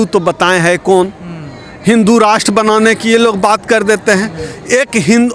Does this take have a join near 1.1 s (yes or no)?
no